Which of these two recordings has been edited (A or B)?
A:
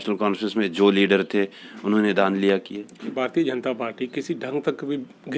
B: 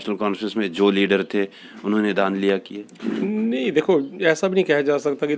A